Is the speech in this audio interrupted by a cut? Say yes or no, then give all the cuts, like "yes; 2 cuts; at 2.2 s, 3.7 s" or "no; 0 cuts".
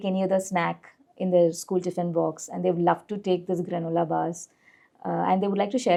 no; 0 cuts